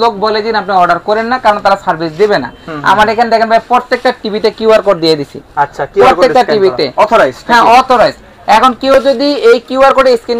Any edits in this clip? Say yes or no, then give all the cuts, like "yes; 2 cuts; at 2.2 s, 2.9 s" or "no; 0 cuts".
no; 0 cuts